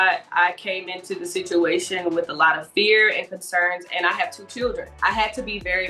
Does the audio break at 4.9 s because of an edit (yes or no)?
yes